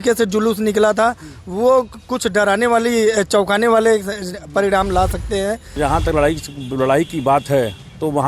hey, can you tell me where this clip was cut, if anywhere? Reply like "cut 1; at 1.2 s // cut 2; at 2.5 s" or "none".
cut 1; at 5.8 s